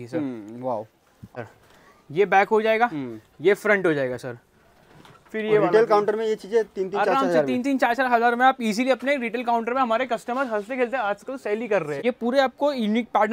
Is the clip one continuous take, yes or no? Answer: no